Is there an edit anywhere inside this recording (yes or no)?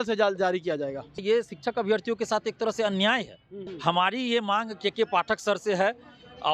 yes